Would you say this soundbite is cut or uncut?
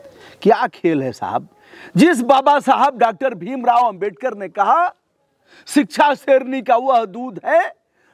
uncut